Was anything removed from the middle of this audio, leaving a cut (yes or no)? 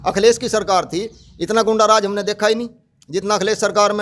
no